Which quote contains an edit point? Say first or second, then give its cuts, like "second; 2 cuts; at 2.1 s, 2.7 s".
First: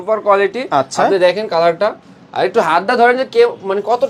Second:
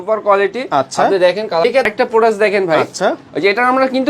second; 1 cut; at 1.6 s